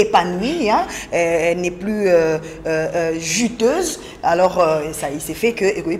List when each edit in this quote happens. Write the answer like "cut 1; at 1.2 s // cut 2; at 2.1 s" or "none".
none